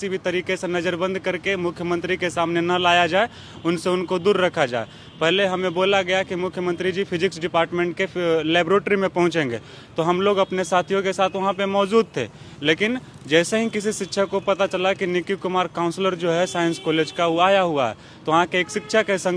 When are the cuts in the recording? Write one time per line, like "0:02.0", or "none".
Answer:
none